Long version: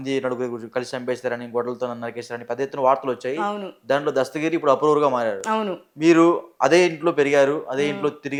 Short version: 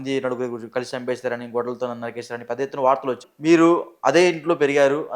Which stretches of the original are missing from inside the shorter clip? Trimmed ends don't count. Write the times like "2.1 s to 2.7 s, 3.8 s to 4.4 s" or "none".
3.3 s to 5.8 s